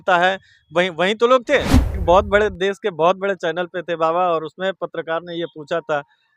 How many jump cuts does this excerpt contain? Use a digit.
1